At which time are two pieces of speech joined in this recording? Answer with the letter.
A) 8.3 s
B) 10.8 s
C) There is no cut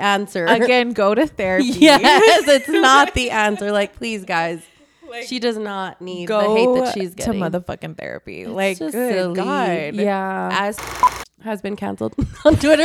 B